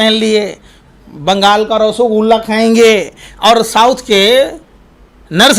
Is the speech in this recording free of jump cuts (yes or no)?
yes